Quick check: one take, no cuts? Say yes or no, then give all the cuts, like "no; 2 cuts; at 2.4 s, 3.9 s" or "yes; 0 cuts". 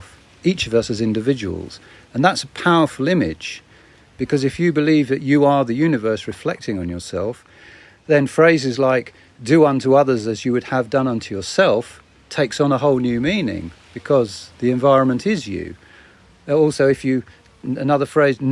yes; 0 cuts